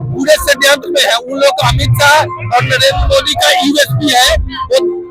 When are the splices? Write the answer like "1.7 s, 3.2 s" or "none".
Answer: none